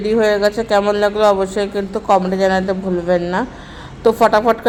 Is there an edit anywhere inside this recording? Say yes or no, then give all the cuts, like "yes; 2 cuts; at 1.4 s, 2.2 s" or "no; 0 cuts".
no; 0 cuts